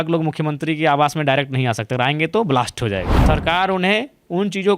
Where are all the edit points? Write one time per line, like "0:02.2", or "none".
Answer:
0:03.2